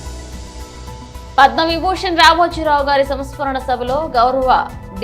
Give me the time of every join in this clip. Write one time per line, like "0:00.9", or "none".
none